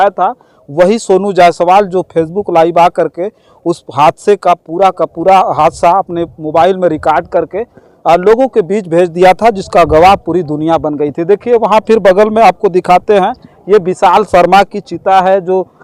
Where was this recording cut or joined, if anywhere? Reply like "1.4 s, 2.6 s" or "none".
none